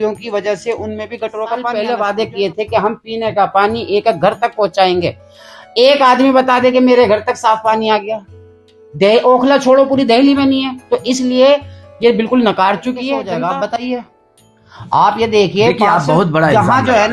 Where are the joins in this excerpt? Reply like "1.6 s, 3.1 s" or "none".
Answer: 1.7 s, 13.2 s